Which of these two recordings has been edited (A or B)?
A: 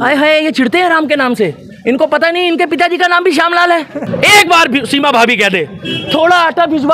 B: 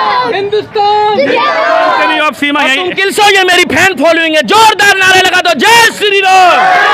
A